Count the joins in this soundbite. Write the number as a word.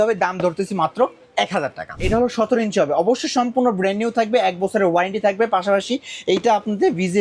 one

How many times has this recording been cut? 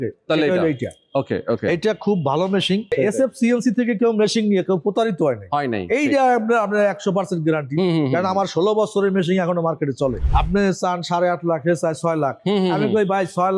two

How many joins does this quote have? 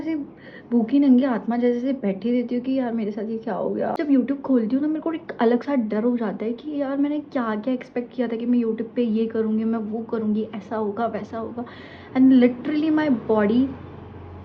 one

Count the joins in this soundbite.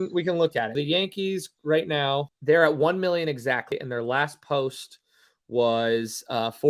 three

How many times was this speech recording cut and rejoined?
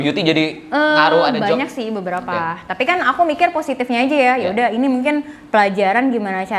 zero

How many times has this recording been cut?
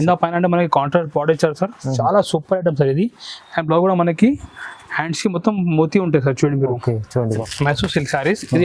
one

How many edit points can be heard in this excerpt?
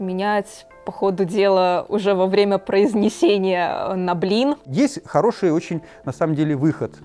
one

